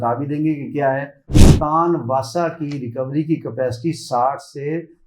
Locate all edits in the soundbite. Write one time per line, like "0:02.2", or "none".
0:01.4